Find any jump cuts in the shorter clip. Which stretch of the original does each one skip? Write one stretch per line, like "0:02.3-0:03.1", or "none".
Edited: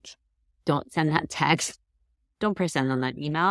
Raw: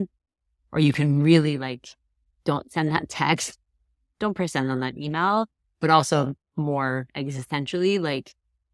none